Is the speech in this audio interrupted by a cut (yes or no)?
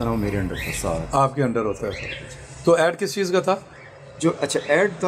no